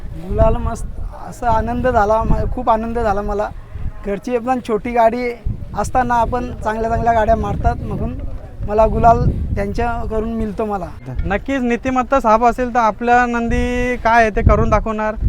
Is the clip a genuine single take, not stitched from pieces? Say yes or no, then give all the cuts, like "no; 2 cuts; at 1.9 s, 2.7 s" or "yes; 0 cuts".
no; 1 cut; at 11.1 s